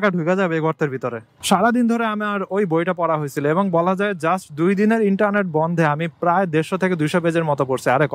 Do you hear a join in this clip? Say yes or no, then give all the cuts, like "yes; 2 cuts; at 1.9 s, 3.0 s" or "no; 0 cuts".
yes; 1 cut; at 1.3 s